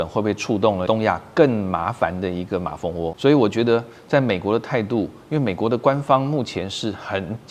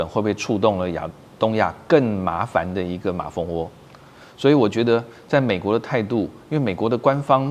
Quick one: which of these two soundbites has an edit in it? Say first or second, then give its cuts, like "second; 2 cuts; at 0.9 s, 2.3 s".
first; 2 cuts; at 0.8 s, 3.2 s